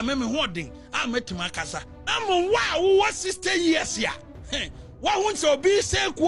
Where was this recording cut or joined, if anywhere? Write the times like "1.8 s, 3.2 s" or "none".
2.1 s